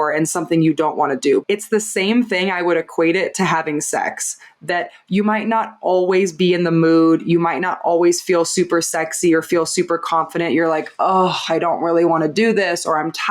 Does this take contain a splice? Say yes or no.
yes